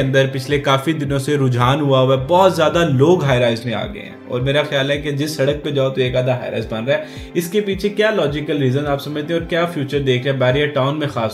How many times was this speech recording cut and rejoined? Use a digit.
0